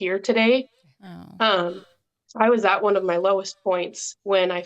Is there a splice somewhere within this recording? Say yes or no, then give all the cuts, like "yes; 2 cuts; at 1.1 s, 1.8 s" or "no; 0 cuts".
no; 0 cuts